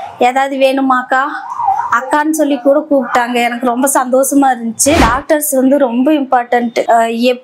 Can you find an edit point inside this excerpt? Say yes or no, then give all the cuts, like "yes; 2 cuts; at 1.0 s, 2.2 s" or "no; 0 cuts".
yes; 1 cut; at 5.0 s